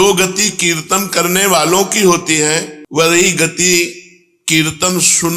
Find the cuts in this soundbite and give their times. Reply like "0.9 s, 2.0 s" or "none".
none